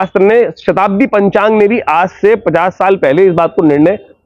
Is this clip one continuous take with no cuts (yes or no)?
yes